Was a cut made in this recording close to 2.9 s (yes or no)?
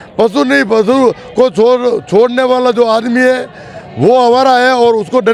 no